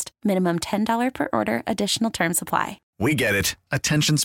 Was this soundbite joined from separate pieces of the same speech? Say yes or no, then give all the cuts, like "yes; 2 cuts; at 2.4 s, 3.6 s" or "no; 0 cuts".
yes; 1 cut; at 2.8 s